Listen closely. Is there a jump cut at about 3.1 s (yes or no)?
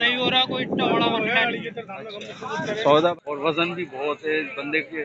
yes